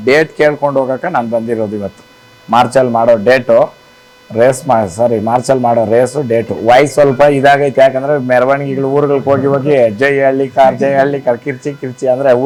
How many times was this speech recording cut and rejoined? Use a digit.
0